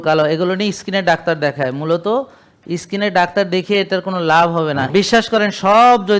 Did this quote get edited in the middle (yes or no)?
yes